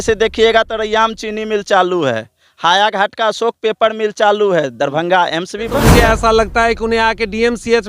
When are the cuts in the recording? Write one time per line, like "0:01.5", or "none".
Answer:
0:05.8